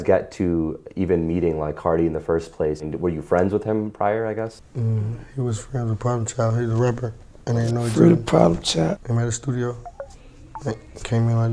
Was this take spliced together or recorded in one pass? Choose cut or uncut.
cut